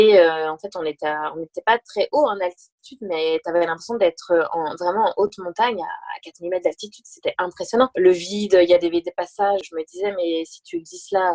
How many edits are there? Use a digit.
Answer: 2